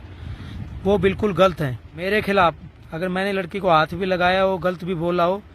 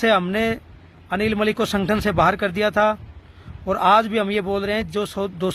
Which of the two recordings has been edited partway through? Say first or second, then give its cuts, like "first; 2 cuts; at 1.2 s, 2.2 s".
first; 1 cut; at 1.9 s